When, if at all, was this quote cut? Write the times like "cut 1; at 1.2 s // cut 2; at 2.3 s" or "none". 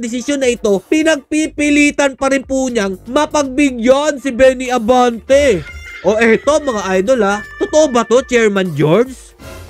none